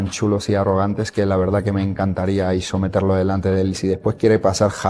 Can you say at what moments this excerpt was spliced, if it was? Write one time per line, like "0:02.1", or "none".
0:03.8

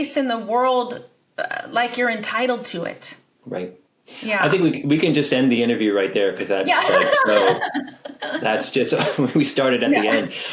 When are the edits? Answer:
none

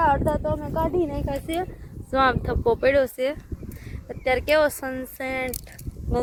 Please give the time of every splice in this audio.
none

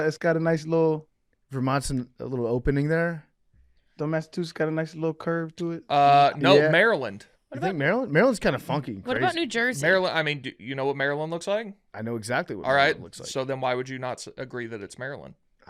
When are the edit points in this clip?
none

